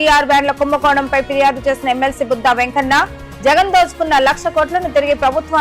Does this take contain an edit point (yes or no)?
no